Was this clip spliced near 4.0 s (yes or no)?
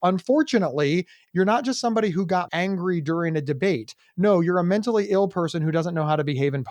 no